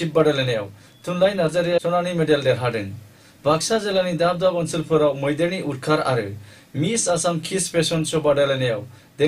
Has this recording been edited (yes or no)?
yes